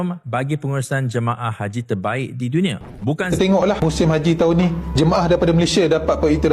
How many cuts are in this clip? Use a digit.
1